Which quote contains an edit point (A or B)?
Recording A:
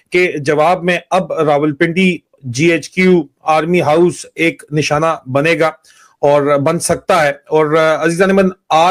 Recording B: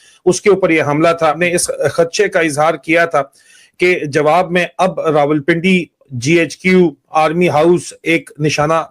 B